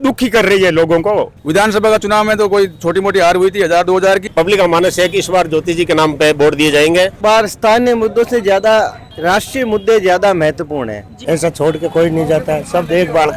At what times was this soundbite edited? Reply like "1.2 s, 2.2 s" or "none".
1.3 s, 4.3 s, 7.1 s, 11.2 s